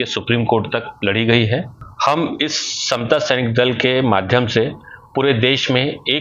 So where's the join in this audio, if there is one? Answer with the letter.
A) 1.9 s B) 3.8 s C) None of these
A